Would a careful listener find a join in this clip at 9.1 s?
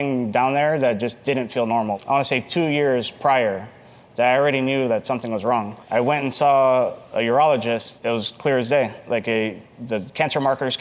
no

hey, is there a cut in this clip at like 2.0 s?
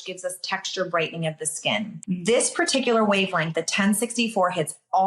yes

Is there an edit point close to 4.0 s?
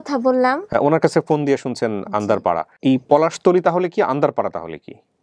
no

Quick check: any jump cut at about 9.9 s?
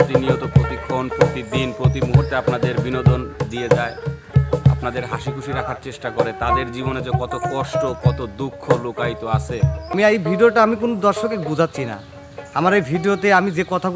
yes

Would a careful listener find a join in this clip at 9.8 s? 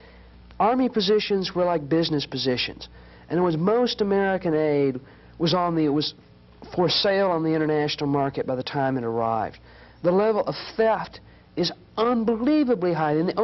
no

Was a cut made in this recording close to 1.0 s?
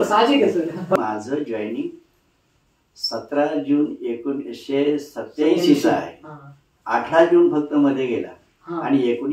yes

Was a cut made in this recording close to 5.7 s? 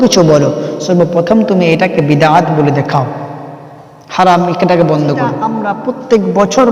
yes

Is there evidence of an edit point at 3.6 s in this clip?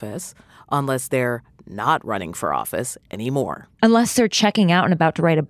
yes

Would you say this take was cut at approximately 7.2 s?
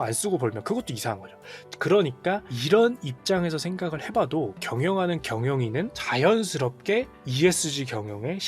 yes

